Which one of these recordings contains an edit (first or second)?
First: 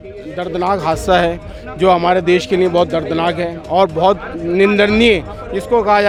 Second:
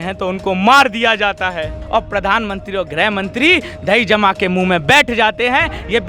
second